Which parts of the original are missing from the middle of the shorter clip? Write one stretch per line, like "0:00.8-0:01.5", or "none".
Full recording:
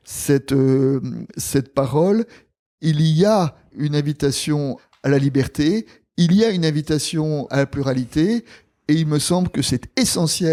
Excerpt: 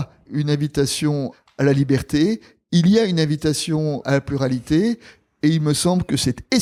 none

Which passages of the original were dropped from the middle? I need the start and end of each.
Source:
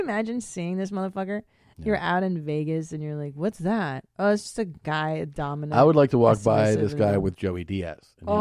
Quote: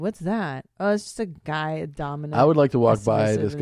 none

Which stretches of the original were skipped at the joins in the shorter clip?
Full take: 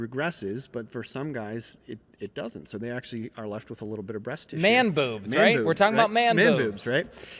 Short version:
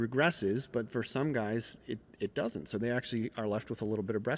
none

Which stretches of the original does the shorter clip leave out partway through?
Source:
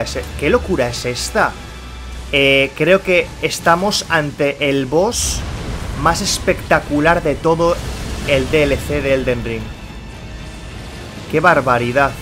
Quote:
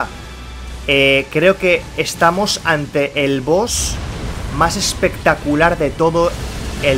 none

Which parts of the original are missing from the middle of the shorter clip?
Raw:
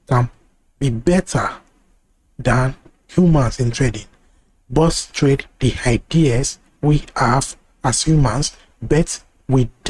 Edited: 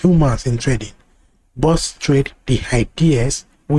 none

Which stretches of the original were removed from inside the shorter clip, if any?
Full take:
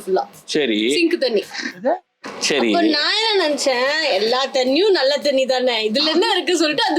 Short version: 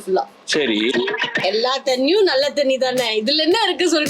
0:01.0-0:03.7

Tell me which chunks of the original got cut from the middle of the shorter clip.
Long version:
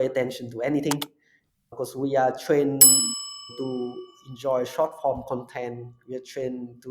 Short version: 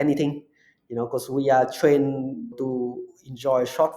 0:03.1-0:03.4

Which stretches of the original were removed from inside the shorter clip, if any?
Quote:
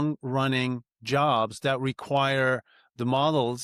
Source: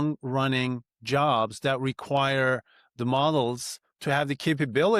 none

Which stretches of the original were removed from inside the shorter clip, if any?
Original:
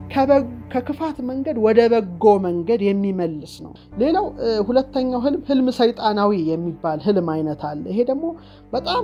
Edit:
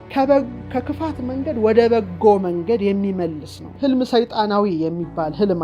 0:03.7-0:05.4

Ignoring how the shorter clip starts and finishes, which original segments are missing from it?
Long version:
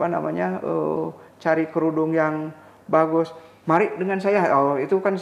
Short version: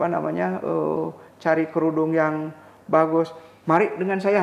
none

